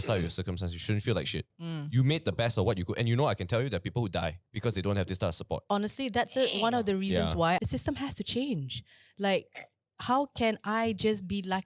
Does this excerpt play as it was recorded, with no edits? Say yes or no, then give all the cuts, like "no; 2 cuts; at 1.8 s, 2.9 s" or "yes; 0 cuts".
no; 4 cuts; at 1.6 s, 4.5 s, 5.6 s, 7.6 s